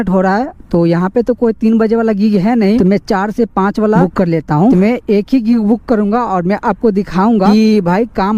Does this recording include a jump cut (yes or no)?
no